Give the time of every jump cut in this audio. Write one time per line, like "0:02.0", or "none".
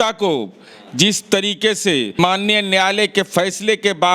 0:02.2